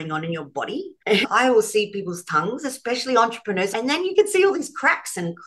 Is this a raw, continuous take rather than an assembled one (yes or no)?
no